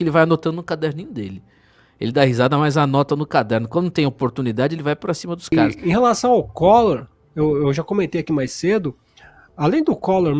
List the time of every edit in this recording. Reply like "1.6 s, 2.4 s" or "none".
5.5 s